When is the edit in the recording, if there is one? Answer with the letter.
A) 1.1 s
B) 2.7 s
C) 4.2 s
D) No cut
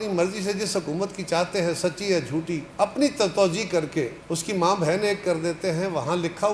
D